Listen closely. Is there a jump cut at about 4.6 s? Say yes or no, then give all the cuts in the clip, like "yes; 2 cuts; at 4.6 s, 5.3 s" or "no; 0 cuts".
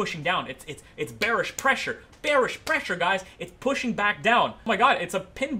yes; 1 cut; at 4.6 s